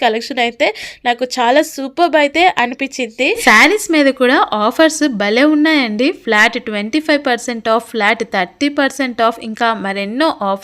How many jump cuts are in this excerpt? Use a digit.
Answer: 1